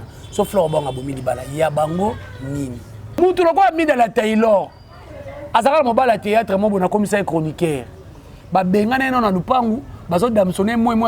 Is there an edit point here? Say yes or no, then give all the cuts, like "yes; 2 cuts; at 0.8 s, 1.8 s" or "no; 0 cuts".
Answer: yes; 1 cut; at 3.2 s